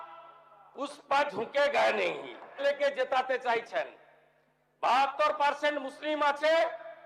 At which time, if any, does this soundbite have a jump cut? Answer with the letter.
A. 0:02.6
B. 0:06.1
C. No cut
A